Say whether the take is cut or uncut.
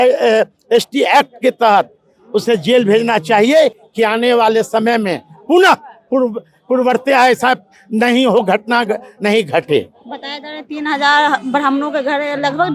uncut